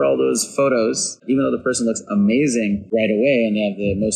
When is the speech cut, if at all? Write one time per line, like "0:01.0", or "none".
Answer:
0:01.2